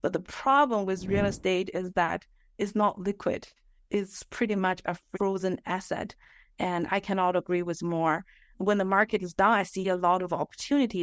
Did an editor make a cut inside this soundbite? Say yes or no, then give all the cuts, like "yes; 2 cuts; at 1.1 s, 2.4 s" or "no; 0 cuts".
no; 0 cuts